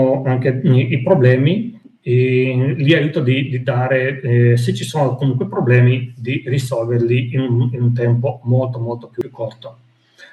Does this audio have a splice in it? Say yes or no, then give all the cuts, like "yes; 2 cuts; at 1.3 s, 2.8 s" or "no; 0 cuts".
yes; 1 cut; at 9.2 s